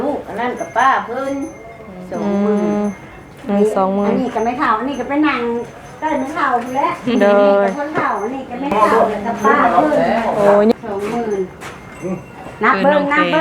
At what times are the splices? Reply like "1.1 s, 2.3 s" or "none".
10.7 s